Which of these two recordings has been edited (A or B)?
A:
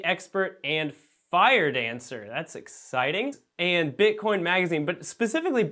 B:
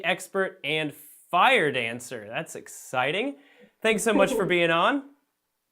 B